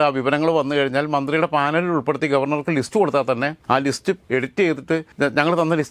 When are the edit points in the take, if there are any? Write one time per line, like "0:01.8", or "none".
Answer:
0:04.0
0:05.1